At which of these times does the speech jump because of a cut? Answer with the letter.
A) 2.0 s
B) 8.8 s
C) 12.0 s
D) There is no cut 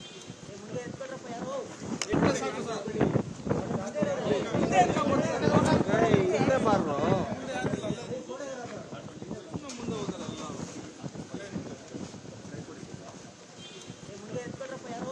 D